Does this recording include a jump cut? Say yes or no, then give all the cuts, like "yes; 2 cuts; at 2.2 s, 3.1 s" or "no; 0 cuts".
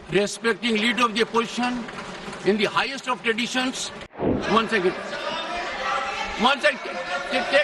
yes; 1 cut; at 4.4 s